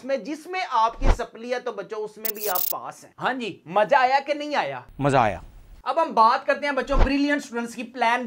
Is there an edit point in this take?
no; 0 cuts

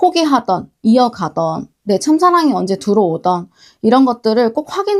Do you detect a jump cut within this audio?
no; 0 cuts

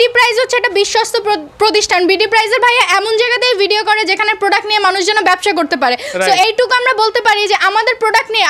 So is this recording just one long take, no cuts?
yes; 0 cuts

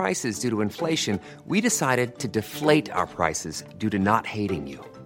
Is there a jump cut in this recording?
no; 0 cuts

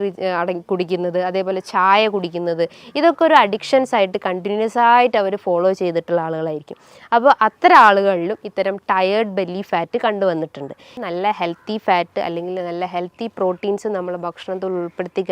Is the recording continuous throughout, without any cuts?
no; 1 cut; at 11.0 s

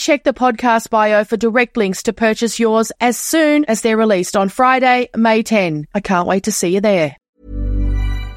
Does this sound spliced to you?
yes; 1 cut; at 7.3 s

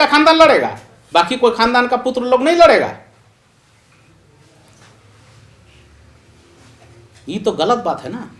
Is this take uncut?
yes; 0 cuts

